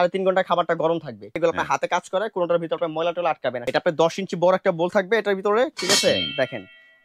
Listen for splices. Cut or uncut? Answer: cut